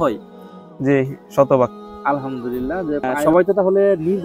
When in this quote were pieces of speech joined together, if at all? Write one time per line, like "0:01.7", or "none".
0:03.1